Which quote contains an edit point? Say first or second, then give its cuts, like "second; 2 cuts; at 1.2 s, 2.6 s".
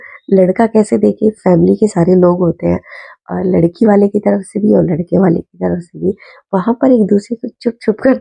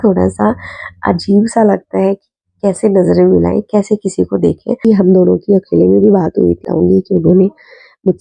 second; 2 cuts; at 4.8 s, 6.6 s